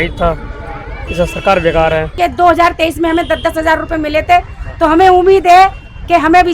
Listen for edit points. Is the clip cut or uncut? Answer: cut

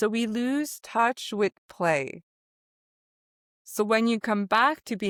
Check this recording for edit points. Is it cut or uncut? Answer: uncut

